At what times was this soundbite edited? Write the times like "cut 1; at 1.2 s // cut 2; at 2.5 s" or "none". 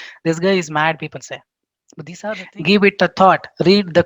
cut 1; at 2.2 s